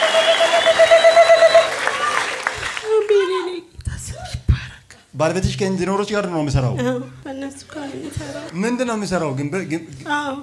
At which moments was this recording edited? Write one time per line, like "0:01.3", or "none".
0:05.1
0:07.1
0:08.5